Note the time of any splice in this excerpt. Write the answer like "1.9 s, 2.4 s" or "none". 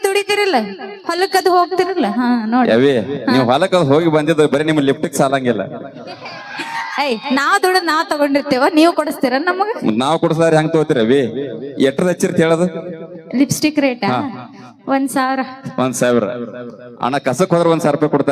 none